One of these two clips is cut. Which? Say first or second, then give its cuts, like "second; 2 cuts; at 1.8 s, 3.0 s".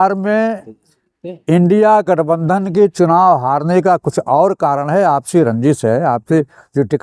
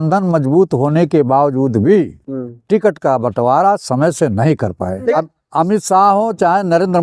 second; 1 cut; at 5.1 s